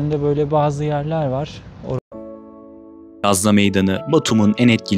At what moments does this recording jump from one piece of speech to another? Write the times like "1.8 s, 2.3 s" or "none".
2.0 s

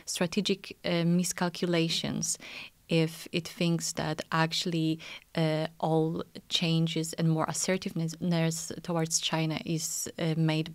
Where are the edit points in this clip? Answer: none

